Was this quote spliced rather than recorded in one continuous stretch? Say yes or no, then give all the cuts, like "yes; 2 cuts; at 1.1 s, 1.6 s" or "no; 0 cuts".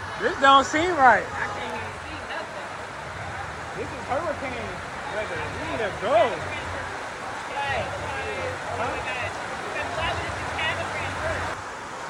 no; 0 cuts